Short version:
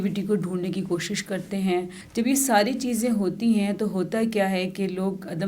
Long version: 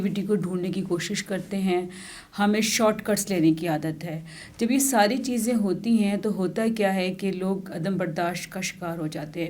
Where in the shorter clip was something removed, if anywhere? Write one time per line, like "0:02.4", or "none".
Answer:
0:02.0